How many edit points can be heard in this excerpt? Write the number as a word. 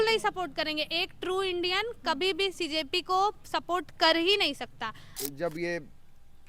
one